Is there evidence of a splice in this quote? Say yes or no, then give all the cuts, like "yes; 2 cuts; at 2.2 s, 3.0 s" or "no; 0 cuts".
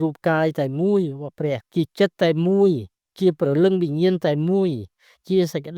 yes; 1 cut; at 1.6 s